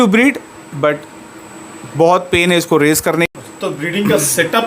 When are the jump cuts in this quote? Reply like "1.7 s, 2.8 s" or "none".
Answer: 3.2 s